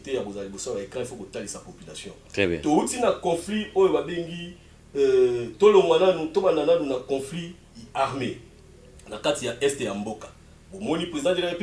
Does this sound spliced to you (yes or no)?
no